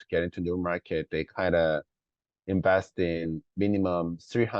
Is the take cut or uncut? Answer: uncut